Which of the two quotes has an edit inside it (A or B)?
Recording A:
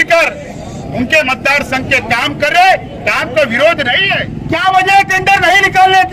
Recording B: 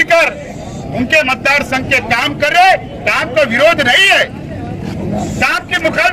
A